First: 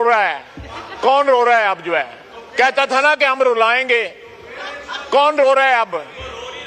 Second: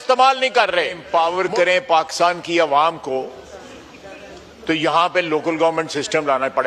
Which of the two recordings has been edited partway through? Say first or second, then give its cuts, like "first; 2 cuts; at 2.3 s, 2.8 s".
second; 1 cut; at 1.0 s